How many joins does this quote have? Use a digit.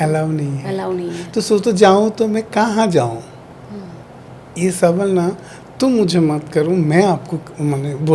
0